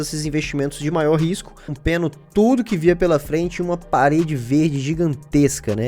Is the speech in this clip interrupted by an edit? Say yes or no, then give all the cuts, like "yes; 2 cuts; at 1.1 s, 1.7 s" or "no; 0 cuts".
yes; 1 cut; at 1.8 s